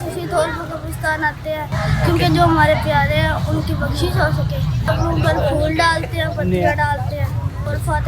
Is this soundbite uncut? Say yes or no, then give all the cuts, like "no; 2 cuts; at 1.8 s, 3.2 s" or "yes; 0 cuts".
yes; 0 cuts